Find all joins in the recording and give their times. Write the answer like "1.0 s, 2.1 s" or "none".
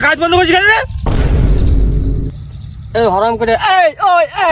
0.9 s, 2.2 s